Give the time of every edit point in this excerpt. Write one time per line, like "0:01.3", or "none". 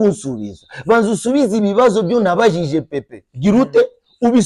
none